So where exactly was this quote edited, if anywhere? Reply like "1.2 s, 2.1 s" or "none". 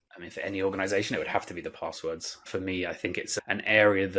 2.4 s, 3.3 s